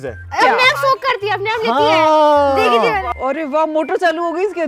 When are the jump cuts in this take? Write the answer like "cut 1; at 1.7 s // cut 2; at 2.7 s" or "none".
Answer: cut 1; at 3.1 s